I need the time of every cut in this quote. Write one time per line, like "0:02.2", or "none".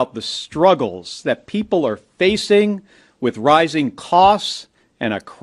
none